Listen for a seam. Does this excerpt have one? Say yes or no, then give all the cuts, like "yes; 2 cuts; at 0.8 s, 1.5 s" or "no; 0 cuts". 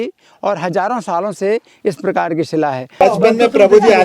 yes; 1 cut; at 3.0 s